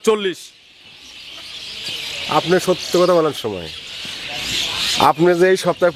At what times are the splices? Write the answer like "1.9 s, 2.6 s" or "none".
3.4 s